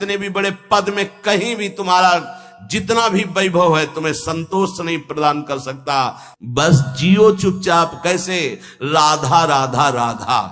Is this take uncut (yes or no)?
no